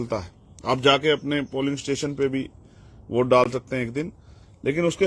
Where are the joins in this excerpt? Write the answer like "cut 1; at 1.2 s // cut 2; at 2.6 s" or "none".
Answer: none